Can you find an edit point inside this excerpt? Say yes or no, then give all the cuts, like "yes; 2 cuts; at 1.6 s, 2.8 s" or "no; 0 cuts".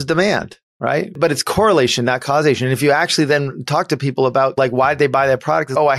yes; 1 cut; at 1.2 s